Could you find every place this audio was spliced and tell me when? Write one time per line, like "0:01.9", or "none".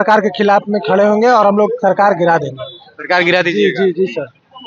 none